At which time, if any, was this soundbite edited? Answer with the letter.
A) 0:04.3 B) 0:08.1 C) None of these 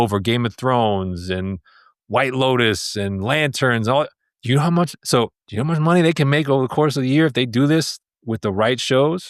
A